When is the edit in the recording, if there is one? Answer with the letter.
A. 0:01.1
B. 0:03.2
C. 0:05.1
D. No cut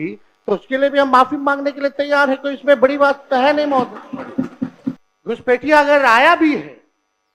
C